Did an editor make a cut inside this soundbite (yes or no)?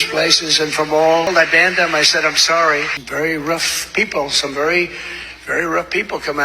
yes